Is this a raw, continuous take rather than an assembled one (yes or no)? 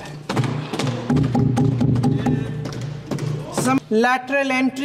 no